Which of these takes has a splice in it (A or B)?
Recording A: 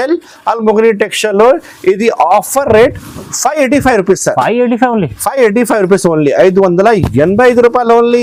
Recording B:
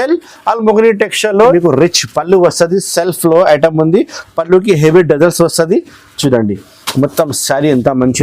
B